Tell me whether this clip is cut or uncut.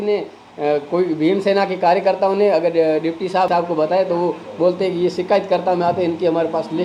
uncut